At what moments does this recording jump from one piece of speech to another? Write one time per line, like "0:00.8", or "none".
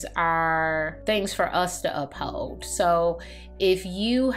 0:00.9